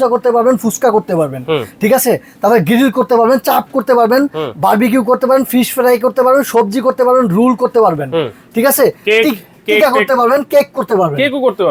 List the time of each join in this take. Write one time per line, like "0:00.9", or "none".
none